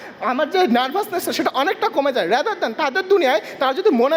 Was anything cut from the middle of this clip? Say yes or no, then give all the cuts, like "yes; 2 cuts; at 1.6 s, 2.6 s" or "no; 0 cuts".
no; 0 cuts